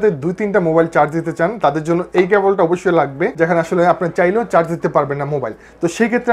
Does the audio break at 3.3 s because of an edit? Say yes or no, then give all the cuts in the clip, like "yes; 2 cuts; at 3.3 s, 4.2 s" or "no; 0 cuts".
yes; 1 cut; at 3.3 s